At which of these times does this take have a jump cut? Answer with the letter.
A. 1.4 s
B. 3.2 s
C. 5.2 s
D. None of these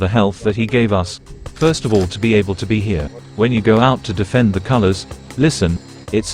B